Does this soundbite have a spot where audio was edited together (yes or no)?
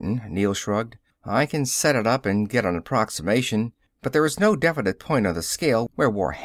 no